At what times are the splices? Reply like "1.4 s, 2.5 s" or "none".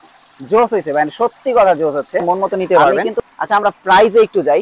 2.6 s